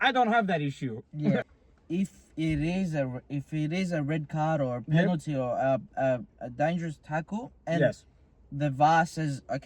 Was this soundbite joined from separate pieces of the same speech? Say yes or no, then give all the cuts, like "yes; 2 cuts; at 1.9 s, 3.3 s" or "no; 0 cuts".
yes; 1 cut; at 1.4 s